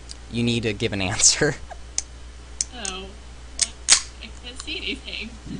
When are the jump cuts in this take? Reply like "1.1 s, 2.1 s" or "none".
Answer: 1.4 s